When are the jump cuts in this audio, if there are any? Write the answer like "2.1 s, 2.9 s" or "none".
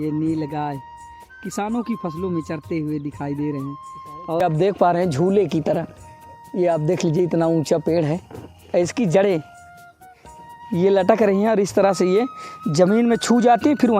4.4 s